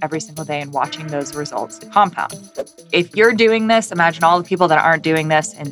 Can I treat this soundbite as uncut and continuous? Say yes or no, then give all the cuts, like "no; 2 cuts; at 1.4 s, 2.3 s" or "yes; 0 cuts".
no; 1 cut; at 2.9 s